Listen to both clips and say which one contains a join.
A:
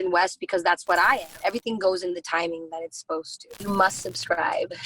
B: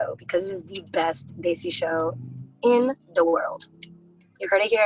A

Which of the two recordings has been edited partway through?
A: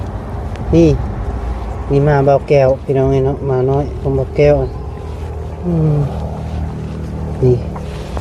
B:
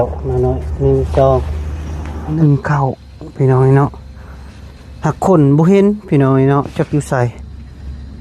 B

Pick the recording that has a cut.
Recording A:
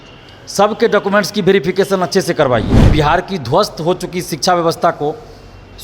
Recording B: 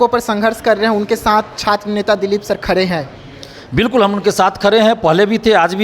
A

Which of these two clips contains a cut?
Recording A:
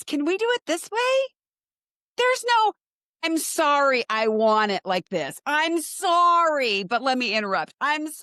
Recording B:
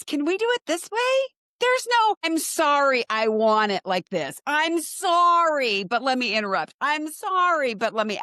B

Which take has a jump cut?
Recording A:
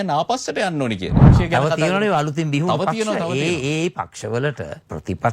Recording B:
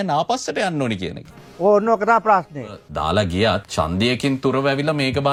A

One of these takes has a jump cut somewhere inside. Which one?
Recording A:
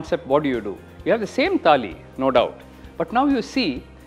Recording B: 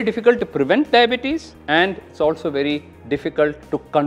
B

